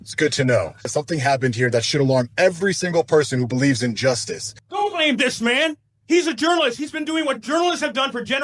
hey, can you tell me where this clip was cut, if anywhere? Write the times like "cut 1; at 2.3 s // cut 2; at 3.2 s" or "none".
cut 1; at 0.9 s // cut 2; at 4.6 s // cut 3; at 5.9 s